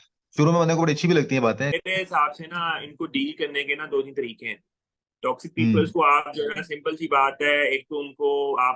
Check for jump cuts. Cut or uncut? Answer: cut